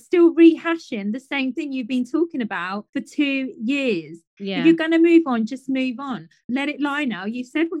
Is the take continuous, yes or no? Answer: no